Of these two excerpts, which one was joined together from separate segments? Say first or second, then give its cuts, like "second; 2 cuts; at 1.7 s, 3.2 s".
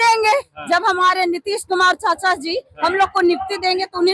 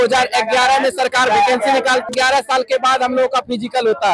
second; 1 cut; at 2.1 s